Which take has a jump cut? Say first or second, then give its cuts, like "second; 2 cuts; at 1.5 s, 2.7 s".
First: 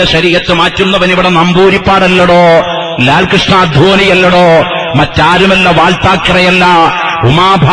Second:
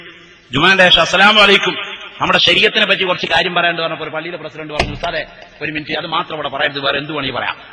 second; 1 cut; at 1.4 s